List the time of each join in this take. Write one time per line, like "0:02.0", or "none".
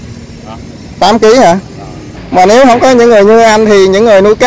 0:02.1